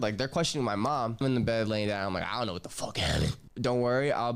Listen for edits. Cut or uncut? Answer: cut